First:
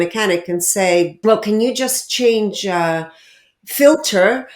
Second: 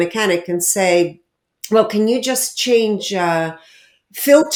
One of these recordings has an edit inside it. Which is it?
first; 1 cut; at 1.1 s

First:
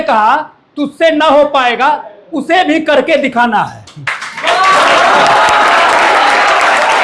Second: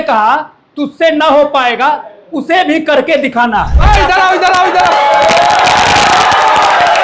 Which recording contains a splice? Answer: second; 1 cut; at 3.8 s

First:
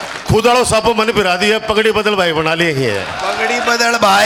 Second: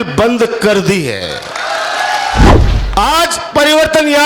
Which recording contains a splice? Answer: second; 1 cut; at 2.5 s

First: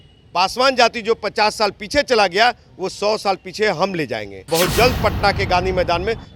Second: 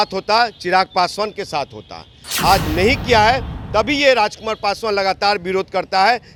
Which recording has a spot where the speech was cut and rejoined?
first; 1 cut; at 4.5 s

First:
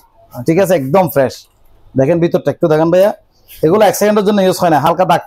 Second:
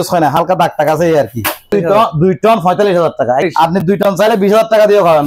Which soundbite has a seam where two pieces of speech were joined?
second; 2 cuts; at 1.7 s, 3.5 s

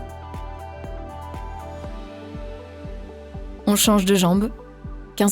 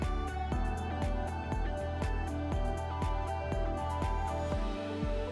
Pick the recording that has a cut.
first; 1 cut; at 3.6 s

